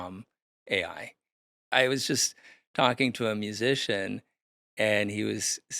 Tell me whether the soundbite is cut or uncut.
cut